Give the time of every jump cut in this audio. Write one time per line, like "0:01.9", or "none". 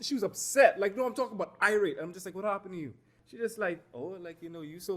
0:03.1